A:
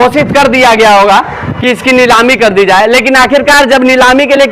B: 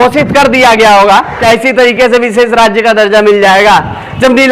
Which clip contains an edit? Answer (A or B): B